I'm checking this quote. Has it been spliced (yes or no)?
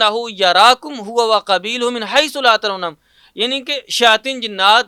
no